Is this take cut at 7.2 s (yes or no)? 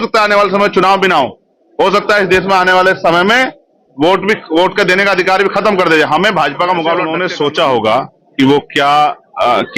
yes